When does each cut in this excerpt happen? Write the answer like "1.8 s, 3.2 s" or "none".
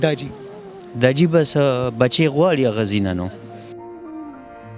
3.4 s